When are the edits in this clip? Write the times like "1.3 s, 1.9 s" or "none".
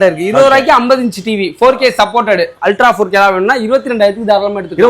2.5 s